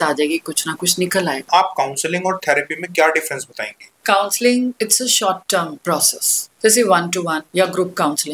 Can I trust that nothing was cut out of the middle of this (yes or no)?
no